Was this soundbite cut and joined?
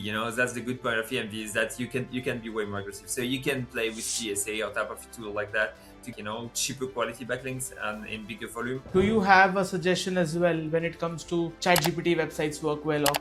yes; 3 cuts; at 6.1 s, 8.8 s, 11.5 s

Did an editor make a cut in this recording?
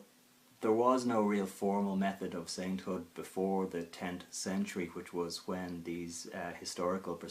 yes; 1 cut; at 3.3 s

